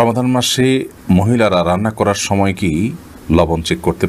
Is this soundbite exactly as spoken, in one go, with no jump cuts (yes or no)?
yes